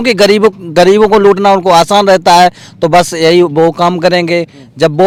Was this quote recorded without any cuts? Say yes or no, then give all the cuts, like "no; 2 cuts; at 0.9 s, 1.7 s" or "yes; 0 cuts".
yes; 0 cuts